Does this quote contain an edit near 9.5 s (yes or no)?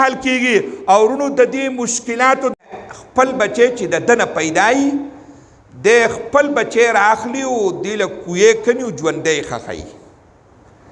no